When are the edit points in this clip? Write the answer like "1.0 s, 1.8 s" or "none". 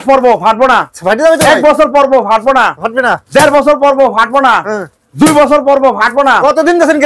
none